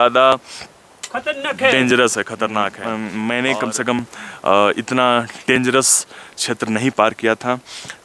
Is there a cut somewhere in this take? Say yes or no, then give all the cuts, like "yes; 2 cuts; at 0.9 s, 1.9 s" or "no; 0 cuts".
yes; 1 cut; at 2.8 s